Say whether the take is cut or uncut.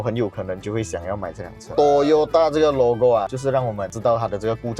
cut